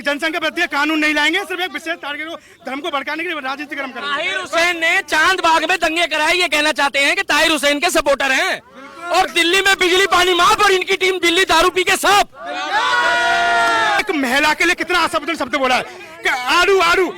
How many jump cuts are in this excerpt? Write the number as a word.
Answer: one